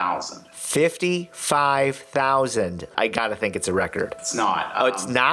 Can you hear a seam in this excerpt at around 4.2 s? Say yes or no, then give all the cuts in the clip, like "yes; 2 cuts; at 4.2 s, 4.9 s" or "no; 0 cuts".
yes; 2 cuts; at 2.9 s, 4.2 s